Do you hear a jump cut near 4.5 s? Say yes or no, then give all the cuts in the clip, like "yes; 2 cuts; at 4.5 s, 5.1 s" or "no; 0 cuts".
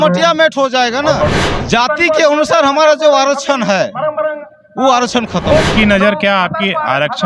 no; 2 cuts; at 1.4 s, 5.7 s